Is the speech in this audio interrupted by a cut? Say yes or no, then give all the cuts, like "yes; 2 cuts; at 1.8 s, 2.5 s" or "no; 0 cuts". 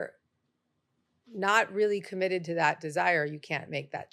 no; 0 cuts